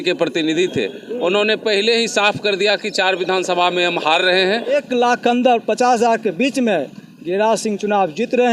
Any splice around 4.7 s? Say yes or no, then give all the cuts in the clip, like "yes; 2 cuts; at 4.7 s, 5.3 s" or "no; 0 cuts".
yes; 1 cut; at 4.7 s